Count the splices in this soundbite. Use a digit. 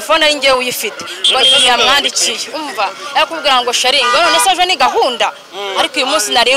0